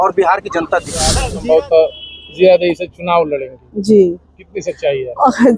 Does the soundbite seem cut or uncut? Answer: cut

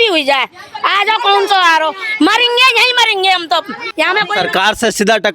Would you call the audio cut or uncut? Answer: cut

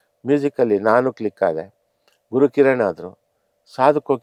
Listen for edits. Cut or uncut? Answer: uncut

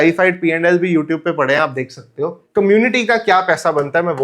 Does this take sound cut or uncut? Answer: uncut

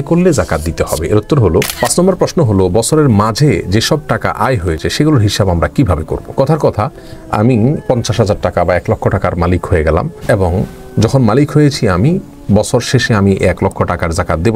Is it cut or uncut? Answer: cut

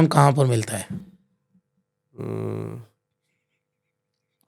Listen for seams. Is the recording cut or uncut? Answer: uncut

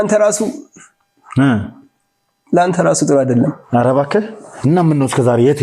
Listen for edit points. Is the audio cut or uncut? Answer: uncut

